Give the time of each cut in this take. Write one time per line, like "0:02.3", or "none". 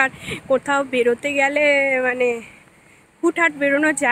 none